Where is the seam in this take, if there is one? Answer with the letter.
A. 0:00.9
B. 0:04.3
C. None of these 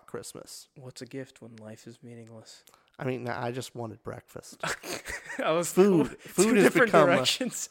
C